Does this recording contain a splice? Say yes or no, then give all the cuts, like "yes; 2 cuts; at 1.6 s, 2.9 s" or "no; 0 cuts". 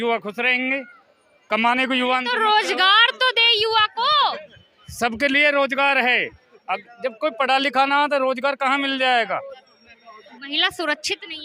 no; 0 cuts